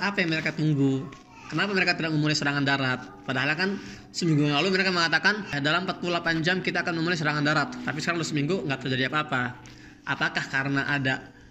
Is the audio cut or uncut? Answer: uncut